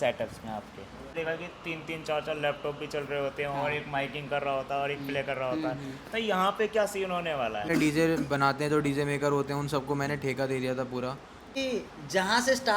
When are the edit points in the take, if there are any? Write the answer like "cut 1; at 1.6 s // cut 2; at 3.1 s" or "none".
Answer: cut 1; at 1.1 s // cut 2; at 7.7 s // cut 3; at 11.6 s

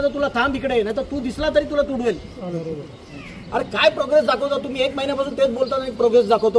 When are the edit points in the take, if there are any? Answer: cut 1; at 2.8 s

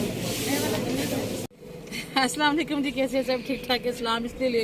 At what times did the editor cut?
cut 1; at 1.4 s

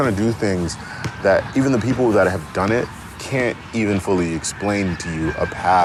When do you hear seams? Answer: none

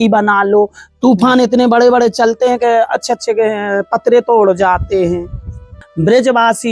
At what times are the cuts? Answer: cut 1; at 5.7 s

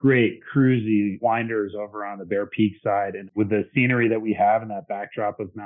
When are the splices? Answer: cut 1; at 1.2 s // cut 2; at 3.4 s

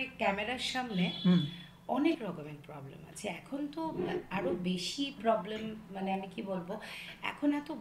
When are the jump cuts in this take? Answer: none

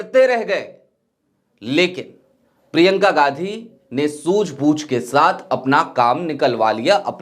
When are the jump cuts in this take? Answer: none

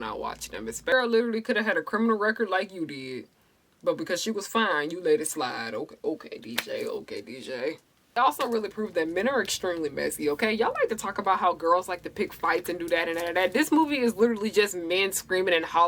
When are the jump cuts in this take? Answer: cut 1; at 0.9 s // cut 2; at 8.1 s

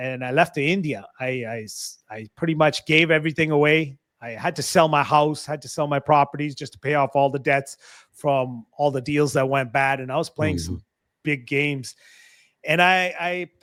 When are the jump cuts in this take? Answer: none

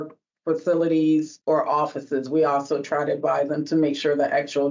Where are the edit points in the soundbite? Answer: cut 1; at 1.3 s

